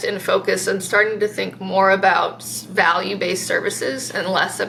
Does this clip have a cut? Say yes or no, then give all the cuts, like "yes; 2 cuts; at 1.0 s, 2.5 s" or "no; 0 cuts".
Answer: no; 0 cuts